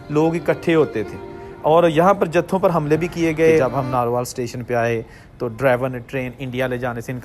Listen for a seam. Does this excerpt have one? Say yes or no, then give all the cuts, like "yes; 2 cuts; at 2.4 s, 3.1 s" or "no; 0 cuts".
yes; 1 cut; at 3.6 s